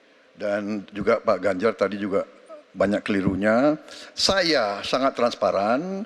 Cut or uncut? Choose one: uncut